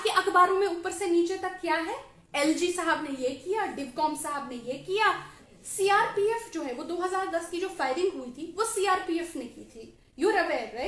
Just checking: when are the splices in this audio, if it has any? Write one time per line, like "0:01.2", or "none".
0:05.3